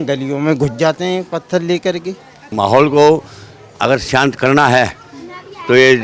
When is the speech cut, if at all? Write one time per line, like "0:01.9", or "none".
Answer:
0:02.5